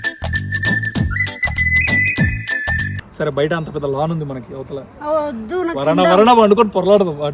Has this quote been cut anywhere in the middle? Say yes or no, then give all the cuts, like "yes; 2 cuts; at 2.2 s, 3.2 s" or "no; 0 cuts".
yes; 1 cut; at 3.0 s